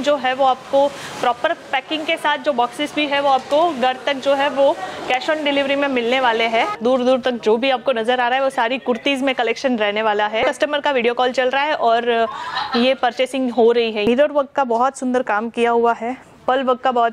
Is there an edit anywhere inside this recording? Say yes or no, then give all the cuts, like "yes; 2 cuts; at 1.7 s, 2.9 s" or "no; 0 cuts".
yes; 3 cuts; at 6.8 s, 10.4 s, 14.1 s